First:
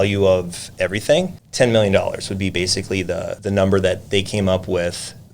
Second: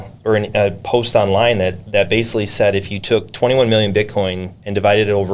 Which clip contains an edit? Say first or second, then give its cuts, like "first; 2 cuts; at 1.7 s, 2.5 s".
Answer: first; 2 cuts; at 1.4 s, 3.4 s